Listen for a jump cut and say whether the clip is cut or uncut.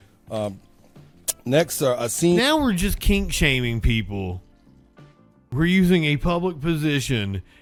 uncut